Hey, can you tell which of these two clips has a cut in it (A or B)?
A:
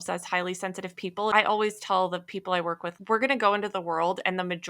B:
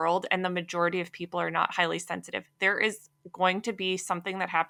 A